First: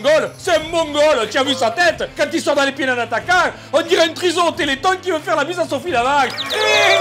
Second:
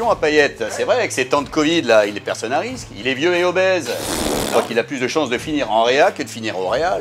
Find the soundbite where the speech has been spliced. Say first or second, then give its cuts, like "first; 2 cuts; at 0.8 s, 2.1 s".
second; 1 cut; at 4.5 s